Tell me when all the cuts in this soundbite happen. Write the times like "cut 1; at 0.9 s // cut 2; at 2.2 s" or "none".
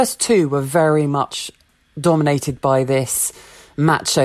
none